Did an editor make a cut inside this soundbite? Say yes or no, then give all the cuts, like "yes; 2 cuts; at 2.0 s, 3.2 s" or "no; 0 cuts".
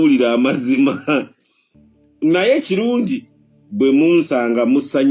no; 0 cuts